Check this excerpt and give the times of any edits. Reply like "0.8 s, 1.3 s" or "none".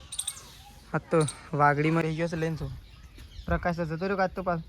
2.0 s